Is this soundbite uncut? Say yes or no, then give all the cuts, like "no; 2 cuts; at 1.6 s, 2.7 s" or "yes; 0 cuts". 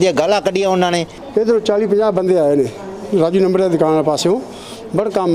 no; 1 cut; at 1.2 s